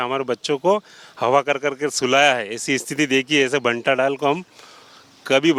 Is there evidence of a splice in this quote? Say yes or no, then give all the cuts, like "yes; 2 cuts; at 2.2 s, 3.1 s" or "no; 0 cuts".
no; 0 cuts